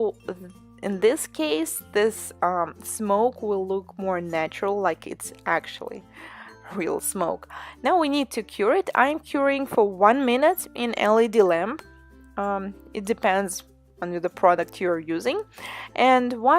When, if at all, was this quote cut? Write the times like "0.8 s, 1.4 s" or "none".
13.2 s